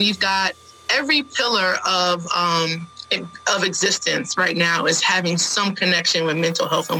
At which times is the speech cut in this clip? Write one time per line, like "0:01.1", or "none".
none